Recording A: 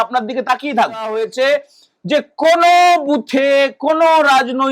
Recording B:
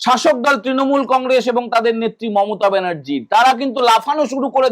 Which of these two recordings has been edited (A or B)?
A